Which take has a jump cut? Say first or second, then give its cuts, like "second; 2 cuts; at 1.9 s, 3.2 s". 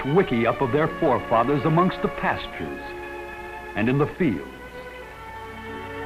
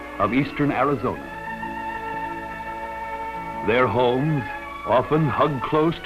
second; 1 cut; at 4.7 s